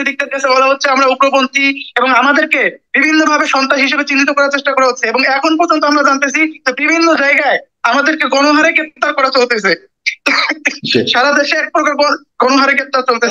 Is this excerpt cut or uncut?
uncut